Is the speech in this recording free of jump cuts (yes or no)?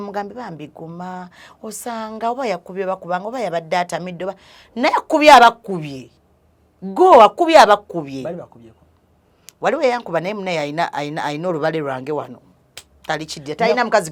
yes